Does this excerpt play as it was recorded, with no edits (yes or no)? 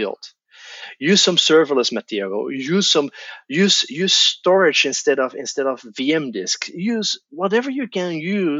yes